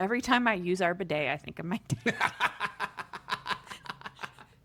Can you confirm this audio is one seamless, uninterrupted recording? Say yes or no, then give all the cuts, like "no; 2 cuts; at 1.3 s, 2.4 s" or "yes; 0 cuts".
yes; 0 cuts